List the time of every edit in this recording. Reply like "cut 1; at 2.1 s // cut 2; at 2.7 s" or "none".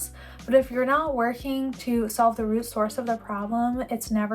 none